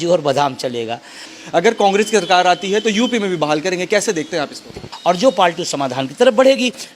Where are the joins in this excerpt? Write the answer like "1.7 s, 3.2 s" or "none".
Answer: 1.3 s, 4.9 s